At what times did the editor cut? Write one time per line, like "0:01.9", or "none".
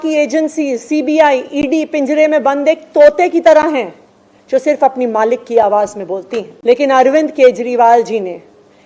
0:06.5